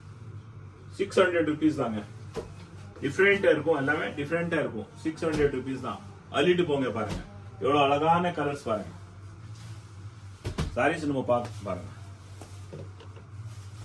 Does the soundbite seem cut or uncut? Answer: uncut